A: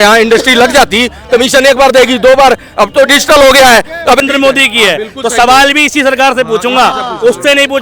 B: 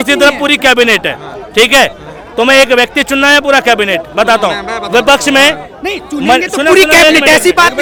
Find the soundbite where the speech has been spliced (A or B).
A